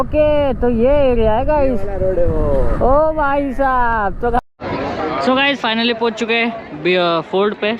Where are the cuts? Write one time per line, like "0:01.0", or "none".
0:04.4